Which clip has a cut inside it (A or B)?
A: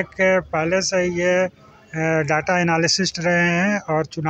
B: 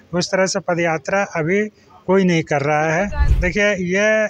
B